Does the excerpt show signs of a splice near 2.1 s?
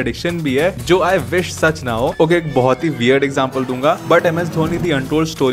yes; 1 cut; at 2.1 s

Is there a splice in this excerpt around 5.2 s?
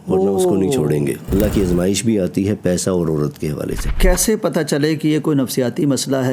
no; 2 cuts; at 1.3 s, 3.9 s

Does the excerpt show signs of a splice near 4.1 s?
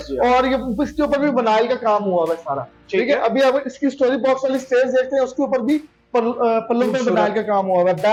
no; 0 cuts

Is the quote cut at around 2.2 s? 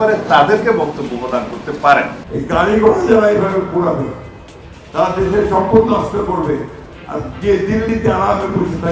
yes; 1 cut; at 2.2 s

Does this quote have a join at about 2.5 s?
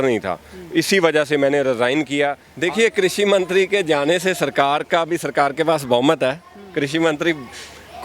yes; 1 cut; at 2.5 s

